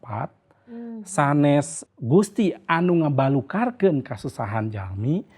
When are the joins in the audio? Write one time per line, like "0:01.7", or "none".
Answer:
0:01.8